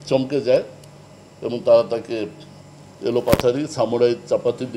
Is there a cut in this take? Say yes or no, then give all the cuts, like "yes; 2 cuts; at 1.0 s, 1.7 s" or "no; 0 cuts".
no; 0 cuts